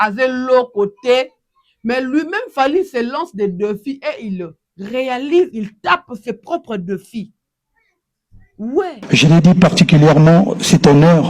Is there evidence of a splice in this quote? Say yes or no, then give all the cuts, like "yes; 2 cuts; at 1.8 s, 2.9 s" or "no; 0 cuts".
yes; 1 cut; at 9.0 s